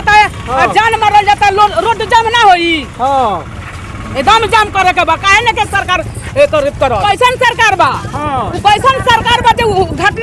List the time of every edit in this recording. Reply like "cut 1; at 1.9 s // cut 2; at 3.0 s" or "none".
cut 1; at 7.0 s